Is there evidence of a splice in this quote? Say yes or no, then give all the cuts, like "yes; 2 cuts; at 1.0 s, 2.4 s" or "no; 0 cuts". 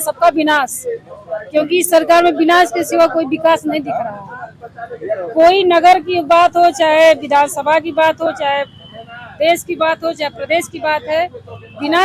no; 0 cuts